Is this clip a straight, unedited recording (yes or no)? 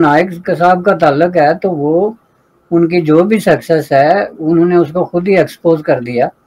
yes